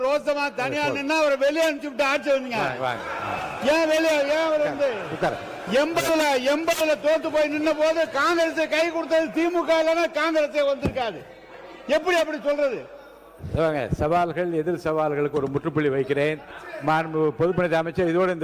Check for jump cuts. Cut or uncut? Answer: uncut